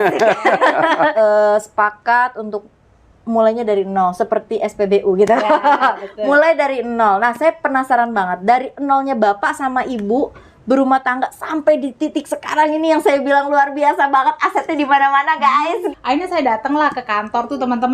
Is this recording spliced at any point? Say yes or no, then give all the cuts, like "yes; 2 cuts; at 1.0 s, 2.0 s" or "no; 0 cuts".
yes; 2 cuts; at 1.1 s, 15.9 s